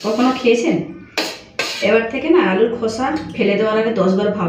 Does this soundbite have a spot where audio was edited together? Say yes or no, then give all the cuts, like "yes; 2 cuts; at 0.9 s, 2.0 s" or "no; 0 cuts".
no; 0 cuts